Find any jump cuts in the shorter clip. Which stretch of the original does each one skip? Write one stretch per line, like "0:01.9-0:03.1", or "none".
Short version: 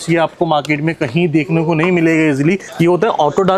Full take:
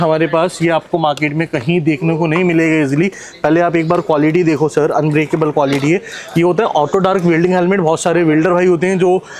0:03.2-0:06.2